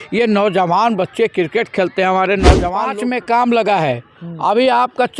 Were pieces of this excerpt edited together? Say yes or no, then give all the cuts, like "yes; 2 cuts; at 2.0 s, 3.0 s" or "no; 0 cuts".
yes; 1 cut; at 2.8 s